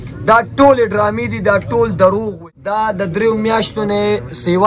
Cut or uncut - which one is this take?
cut